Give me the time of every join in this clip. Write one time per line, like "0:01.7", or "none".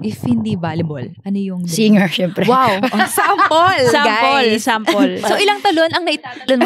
0:05.2